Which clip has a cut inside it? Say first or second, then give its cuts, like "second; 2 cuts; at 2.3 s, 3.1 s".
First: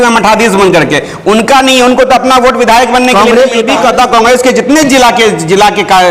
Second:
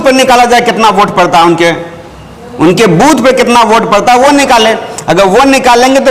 first; 1 cut; at 3.6 s